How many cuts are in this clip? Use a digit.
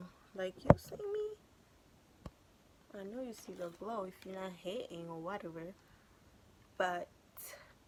0